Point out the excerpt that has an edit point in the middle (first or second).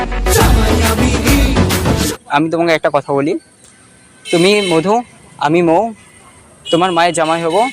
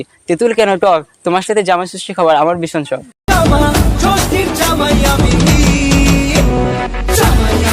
first